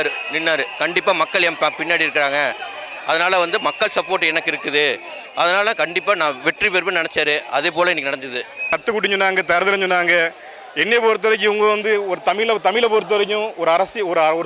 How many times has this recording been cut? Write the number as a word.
one